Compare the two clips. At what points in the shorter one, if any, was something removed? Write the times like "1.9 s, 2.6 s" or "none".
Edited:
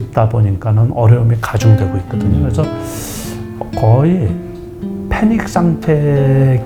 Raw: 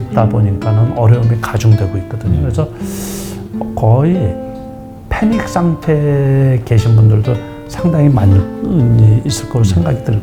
none